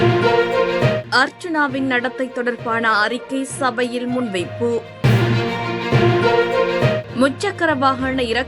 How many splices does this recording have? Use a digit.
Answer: 1